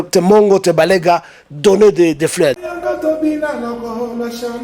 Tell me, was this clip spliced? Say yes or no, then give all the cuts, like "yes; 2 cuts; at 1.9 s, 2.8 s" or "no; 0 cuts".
yes; 1 cut; at 2.6 s